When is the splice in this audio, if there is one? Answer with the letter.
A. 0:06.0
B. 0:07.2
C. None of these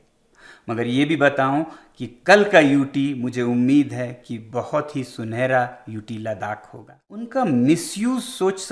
B